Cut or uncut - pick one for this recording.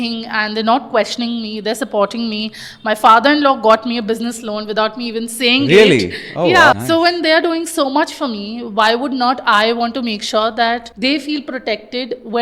cut